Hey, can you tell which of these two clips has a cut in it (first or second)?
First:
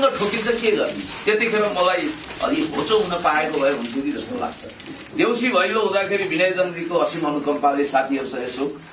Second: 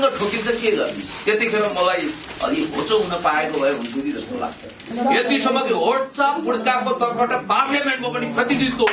second